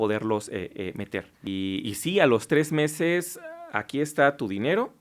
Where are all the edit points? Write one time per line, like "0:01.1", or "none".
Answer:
0:01.5